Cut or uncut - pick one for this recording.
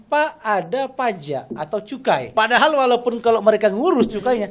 cut